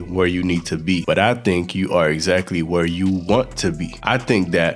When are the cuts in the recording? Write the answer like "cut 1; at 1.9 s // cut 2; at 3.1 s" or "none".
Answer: cut 1; at 1.0 s // cut 2; at 3.9 s